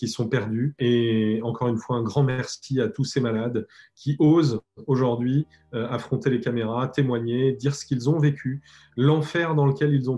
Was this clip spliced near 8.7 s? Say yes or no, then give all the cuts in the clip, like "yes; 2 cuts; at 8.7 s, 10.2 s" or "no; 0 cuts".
no; 0 cuts